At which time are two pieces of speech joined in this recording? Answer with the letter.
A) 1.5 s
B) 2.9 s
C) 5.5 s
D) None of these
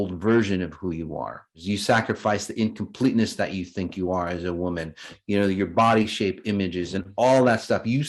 A